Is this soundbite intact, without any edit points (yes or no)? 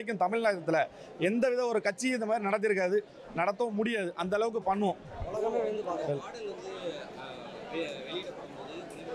yes